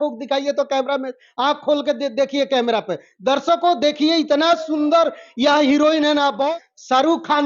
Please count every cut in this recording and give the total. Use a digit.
1